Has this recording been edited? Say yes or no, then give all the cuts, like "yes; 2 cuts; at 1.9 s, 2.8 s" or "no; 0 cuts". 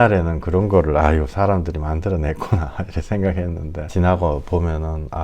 yes; 1 cut; at 3.8 s